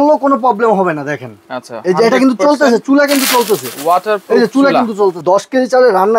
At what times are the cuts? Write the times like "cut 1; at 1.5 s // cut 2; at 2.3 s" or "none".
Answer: cut 1; at 5.2 s